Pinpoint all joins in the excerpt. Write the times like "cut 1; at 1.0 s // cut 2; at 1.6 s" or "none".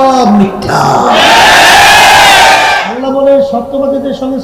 cut 1; at 2.8 s